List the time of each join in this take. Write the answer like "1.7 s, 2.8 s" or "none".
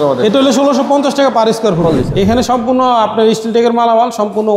1.9 s